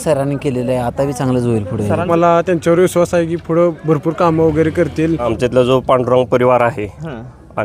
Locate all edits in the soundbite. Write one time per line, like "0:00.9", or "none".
0:02.1
0:05.3